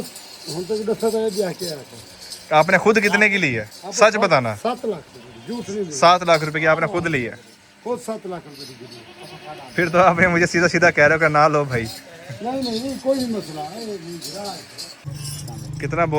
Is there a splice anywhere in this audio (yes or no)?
yes